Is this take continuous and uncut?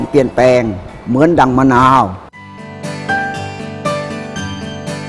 yes; 0 cuts

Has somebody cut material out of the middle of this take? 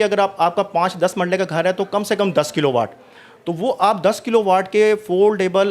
no; 0 cuts

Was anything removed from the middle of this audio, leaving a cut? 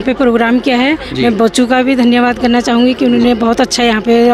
no; 0 cuts

